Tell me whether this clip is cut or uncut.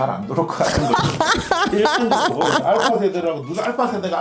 uncut